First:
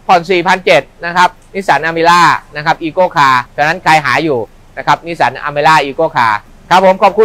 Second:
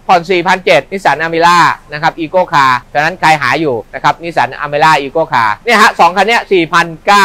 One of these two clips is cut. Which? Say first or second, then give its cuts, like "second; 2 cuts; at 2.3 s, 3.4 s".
second; 3 cuts; at 0.9 s, 3.9 s, 5.6 s